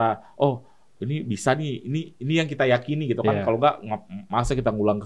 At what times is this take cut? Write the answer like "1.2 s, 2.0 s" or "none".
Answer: none